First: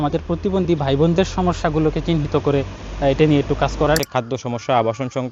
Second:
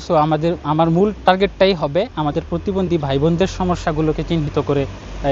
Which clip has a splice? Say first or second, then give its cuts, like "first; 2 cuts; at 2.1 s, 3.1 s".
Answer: first; 1 cut; at 4.0 s